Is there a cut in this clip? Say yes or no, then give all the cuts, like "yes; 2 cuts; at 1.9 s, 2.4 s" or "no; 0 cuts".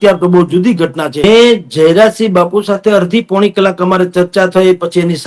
yes; 1 cut; at 1.2 s